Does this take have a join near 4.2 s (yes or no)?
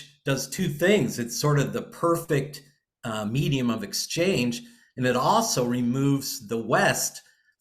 no